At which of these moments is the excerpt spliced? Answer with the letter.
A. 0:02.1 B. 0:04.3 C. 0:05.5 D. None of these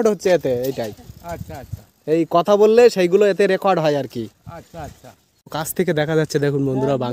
C